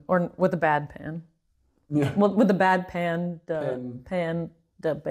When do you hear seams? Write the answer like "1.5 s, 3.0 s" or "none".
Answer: none